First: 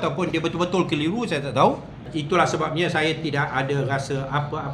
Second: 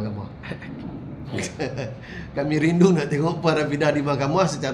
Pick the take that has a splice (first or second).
first